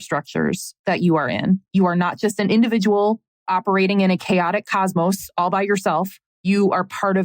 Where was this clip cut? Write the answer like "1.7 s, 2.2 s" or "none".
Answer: 1.7 s, 3.3 s, 6.2 s